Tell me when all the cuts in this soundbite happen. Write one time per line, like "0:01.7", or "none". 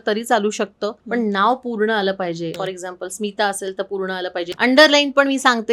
0:01.0
0:02.6
0:04.5